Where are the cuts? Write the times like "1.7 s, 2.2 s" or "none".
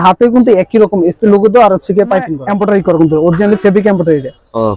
2.4 s